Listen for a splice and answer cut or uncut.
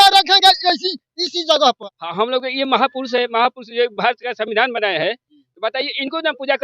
cut